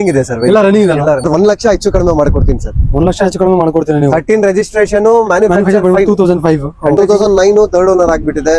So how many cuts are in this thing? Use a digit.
2